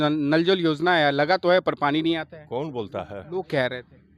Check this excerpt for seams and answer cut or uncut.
uncut